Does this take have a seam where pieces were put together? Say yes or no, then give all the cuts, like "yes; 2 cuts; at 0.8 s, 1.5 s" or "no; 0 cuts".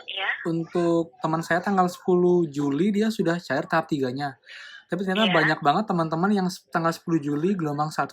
no; 0 cuts